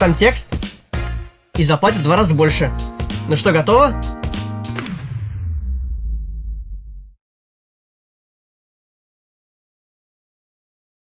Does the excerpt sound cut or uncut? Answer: uncut